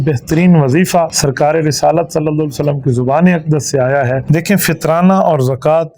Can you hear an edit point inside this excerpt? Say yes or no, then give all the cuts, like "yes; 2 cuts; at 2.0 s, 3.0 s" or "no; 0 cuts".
yes; 2 cuts; at 1.1 s, 4.2 s